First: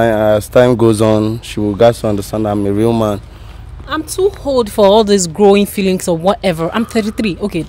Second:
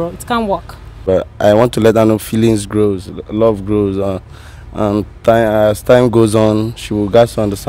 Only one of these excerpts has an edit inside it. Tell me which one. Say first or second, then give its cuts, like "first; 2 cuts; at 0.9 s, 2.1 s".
second; 1 cut; at 1.0 s